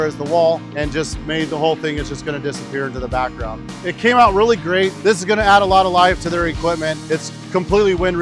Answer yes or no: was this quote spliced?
yes